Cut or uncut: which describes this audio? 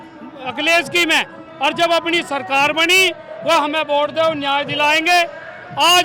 uncut